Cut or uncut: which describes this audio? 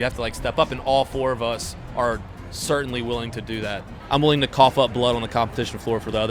cut